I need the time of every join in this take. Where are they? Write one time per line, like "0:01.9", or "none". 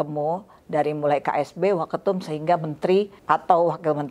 0:03.2